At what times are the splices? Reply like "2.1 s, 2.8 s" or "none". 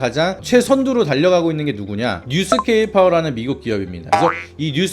4.0 s